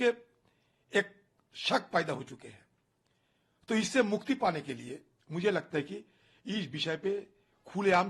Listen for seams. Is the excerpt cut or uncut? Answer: uncut